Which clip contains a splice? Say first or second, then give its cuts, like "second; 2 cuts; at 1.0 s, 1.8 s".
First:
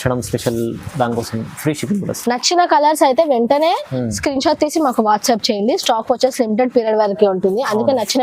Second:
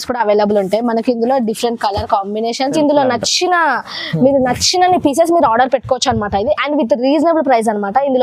second; 1 cut; at 2.7 s